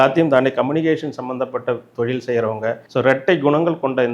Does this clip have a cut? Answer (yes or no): yes